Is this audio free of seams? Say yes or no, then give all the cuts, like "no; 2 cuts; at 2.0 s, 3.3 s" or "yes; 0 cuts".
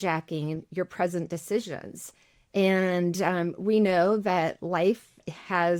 yes; 0 cuts